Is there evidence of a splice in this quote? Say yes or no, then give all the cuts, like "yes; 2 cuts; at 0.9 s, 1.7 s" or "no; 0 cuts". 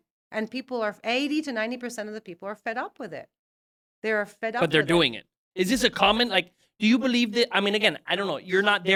no; 0 cuts